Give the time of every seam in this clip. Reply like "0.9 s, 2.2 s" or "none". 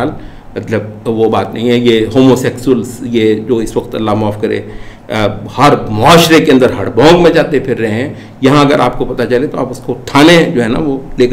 none